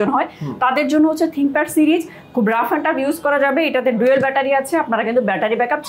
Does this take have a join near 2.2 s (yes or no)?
no